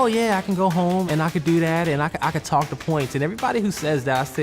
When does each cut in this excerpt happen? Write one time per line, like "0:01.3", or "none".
0:01.1